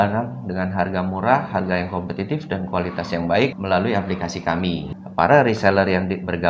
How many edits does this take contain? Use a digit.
2